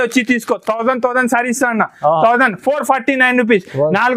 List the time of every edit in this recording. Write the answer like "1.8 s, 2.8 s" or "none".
none